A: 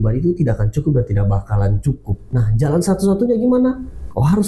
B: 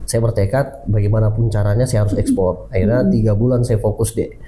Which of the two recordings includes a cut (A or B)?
A